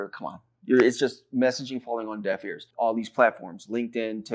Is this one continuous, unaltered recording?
no; 1 cut; at 2.6 s

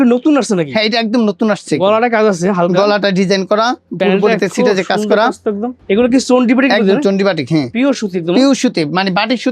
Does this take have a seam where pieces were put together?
yes; 1 cut; at 5.7 s

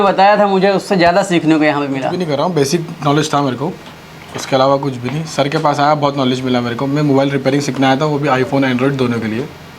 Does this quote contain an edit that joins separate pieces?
yes; 1 cut; at 2.2 s

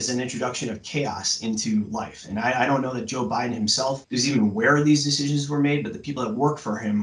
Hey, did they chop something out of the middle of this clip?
yes; 1 cut; at 4.0 s

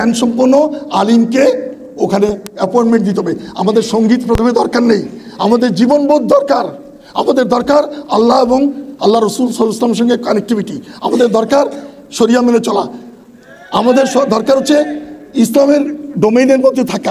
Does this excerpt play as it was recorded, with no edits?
yes; 0 cuts

